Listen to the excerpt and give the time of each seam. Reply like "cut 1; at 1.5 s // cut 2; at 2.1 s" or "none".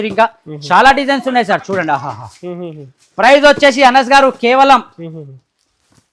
none